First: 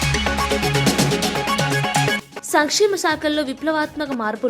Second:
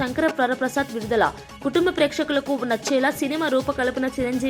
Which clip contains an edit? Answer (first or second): first